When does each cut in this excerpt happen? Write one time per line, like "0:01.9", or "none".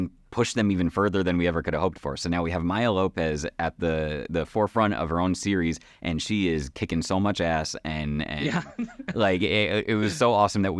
none